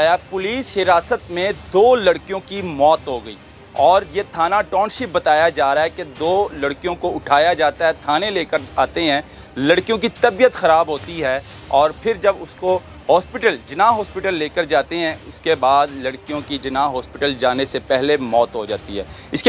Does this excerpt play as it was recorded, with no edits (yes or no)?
yes